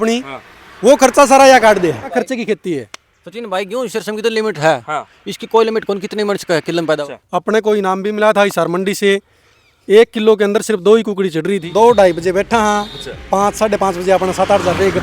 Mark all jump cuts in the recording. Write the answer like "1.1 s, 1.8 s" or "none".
2.2 s, 7.0 s, 11.6 s